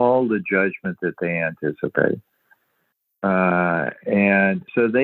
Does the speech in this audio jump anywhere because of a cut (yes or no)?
no